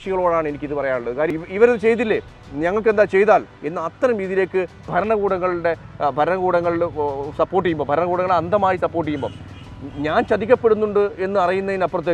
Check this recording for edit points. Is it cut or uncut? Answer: cut